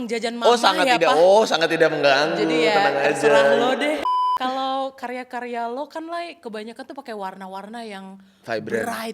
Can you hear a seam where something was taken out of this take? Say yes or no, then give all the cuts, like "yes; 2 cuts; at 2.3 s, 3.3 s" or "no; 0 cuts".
yes; 1 cut; at 4.0 s